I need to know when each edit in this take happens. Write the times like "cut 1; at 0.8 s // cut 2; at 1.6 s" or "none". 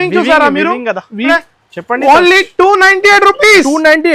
cut 1; at 1.3 s